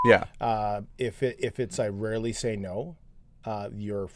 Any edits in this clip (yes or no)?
no